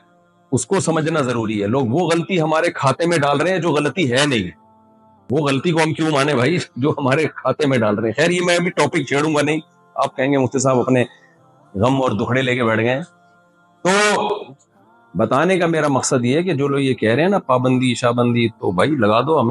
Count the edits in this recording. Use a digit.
0